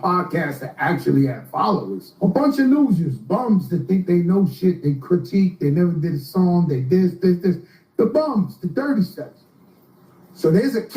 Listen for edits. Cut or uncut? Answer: cut